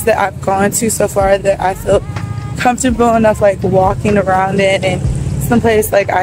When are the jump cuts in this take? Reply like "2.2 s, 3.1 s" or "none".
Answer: none